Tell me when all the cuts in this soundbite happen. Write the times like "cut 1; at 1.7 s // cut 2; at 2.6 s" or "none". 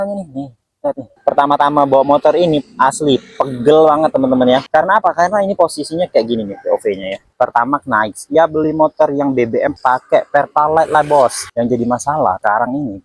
cut 1; at 1.2 s // cut 2; at 7.3 s